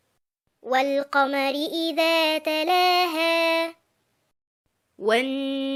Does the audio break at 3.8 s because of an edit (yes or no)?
no